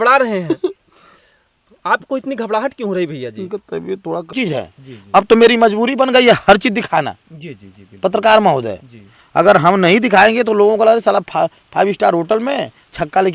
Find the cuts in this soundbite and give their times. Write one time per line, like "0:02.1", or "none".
0:04.3